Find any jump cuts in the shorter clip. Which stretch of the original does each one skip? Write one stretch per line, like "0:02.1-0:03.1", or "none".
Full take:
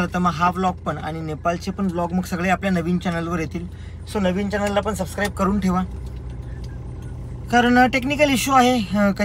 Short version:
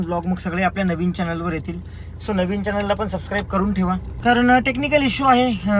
0:06.0-0:07.4